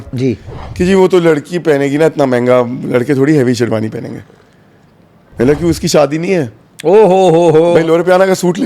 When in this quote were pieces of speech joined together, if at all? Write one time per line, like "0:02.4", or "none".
0:07.7